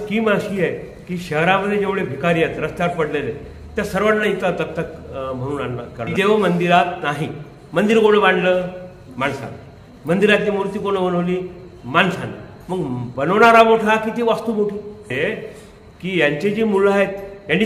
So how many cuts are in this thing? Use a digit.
2